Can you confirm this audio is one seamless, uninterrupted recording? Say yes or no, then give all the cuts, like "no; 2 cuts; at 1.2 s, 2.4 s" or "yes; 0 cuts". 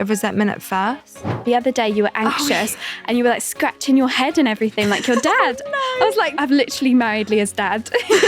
no; 2 cuts; at 1.3 s, 6.3 s